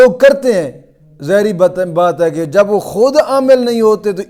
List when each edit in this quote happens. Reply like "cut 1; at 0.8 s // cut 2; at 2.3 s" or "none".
none